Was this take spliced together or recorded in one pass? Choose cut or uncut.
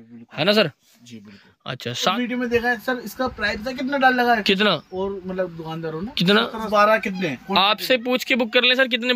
cut